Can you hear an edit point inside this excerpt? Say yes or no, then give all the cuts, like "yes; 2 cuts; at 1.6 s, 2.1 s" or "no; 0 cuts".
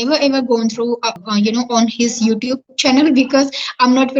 yes; 1 cut; at 1.2 s